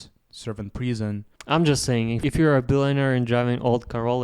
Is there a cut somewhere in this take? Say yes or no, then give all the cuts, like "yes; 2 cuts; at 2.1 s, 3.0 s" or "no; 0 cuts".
yes; 2 cuts; at 1.3 s, 2.2 s